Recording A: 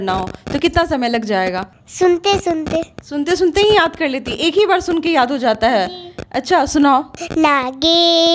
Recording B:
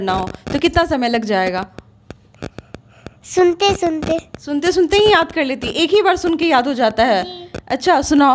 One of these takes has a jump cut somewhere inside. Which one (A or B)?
A